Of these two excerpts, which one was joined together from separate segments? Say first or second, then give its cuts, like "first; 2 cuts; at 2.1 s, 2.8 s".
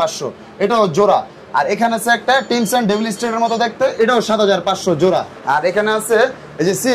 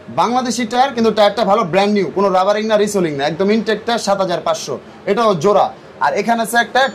first; 1 cut; at 5.4 s